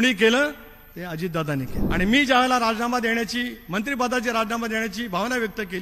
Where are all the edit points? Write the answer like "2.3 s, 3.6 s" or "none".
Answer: 1.8 s